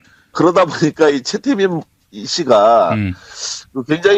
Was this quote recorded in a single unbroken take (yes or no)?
yes